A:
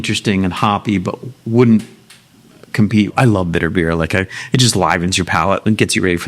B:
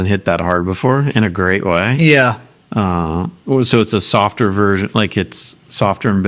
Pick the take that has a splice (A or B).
A